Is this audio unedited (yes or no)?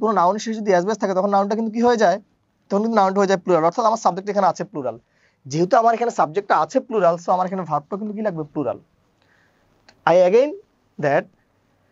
yes